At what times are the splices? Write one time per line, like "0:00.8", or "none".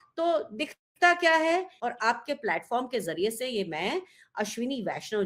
0:01.8